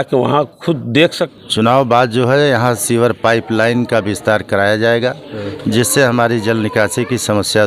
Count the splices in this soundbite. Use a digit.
1